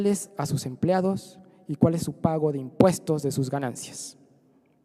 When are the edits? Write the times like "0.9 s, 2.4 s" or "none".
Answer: 2.9 s